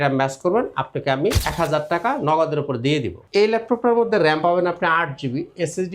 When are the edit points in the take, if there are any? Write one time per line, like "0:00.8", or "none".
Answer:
0:01.4
0:03.2